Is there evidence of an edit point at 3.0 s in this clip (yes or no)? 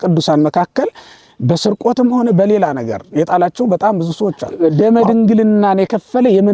no